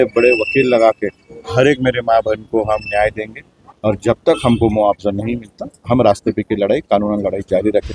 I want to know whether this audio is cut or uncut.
uncut